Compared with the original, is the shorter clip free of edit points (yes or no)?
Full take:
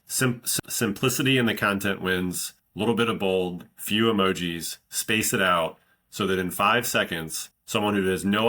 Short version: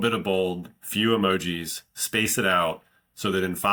yes